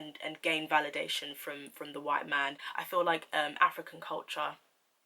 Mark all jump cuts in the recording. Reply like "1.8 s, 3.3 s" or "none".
2.6 s